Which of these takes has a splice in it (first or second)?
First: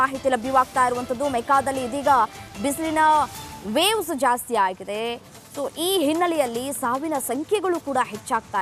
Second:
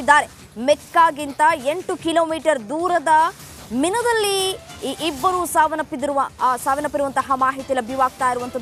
first